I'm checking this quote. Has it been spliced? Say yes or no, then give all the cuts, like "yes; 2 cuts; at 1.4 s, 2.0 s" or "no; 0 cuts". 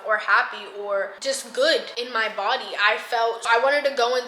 yes; 2 cuts; at 2.0 s, 3.5 s